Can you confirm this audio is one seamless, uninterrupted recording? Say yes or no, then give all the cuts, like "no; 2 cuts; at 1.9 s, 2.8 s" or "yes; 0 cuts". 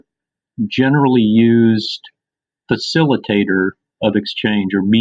yes; 0 cuts